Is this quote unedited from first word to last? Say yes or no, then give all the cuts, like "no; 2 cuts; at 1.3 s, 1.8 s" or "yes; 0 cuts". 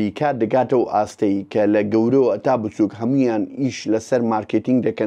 yes; 0 cuts